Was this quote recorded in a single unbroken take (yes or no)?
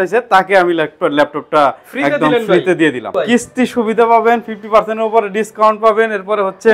no